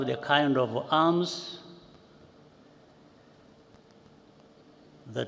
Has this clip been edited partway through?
no; 0 cuts

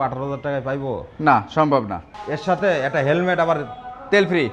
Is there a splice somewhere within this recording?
no; 0 cuts

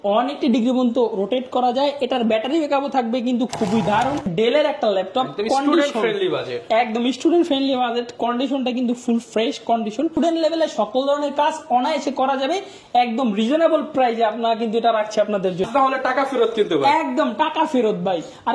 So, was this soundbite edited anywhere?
yes; 3 cuts; at 4.3 s, 10.2 s, 15.7 s

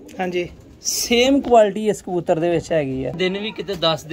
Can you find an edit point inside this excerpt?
yes; 1 cut; at 3.1 s

